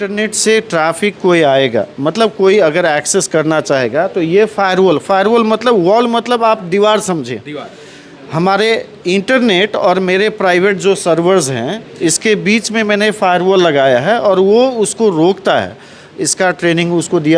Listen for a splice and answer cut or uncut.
uncut